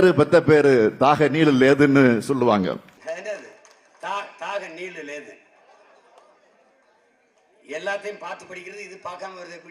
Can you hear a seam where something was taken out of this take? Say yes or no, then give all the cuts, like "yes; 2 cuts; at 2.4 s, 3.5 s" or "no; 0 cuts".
yes; 1 cut; at 3.0 s